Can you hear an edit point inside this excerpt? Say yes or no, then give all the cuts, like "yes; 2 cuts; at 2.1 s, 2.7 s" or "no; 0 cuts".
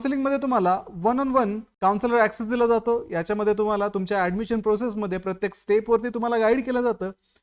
yes; 1 cut; at 1.7 s